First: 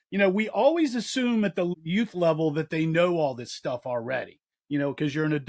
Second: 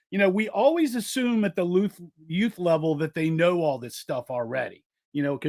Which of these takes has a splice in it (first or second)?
first